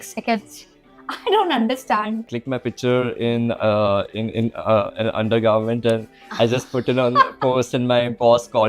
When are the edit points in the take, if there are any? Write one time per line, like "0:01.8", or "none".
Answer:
0:02.4